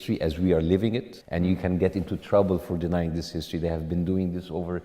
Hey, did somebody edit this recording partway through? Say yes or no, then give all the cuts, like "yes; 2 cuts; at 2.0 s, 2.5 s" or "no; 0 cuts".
yes; 1 cut; at 1.2 s